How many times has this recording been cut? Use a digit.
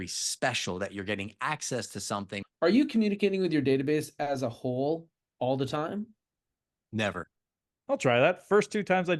2